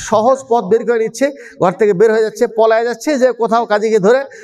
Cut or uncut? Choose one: uncut